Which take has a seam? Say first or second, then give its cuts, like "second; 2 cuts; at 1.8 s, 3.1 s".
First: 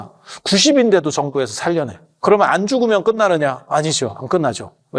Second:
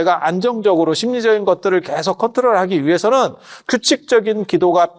first; 1 cut; at 2.2 s